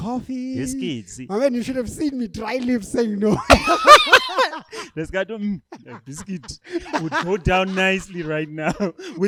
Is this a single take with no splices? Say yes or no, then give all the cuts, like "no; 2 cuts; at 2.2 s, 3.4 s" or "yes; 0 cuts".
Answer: yes; 0 cuts